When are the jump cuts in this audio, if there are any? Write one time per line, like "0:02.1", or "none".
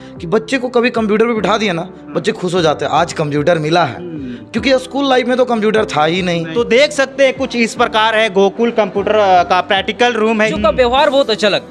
0:06.4
0:10.4